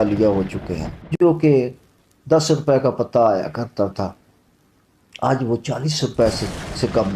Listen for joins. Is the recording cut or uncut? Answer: cut